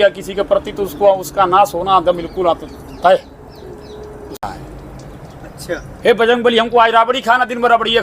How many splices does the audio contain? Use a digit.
1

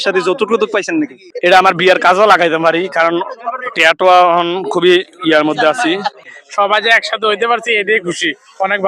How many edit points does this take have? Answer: 2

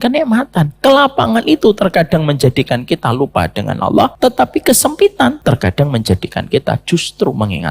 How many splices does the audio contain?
2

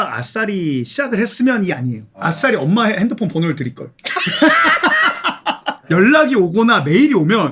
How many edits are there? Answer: 2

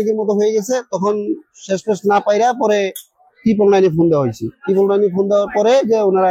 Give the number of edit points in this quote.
0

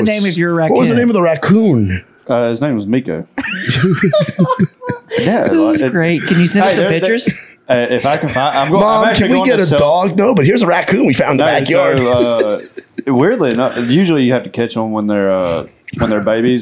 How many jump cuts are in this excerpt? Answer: 0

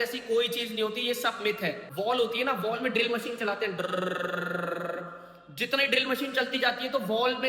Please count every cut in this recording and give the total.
1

